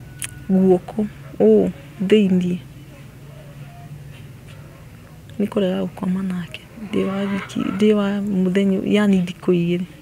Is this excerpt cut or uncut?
uncut